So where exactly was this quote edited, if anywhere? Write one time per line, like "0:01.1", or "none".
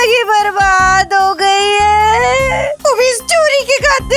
0:02.7